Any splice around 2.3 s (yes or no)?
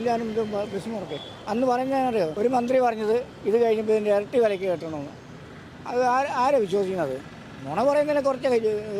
yes